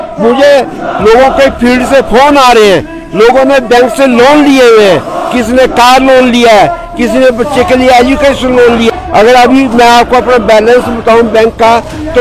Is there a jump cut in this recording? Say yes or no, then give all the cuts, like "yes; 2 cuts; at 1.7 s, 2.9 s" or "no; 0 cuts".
yes; 1 cut; at 8.9 s